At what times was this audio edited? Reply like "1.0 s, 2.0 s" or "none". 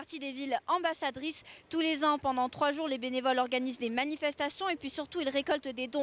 none